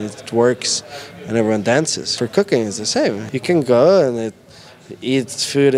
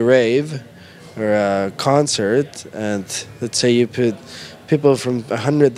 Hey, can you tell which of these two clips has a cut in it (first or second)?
first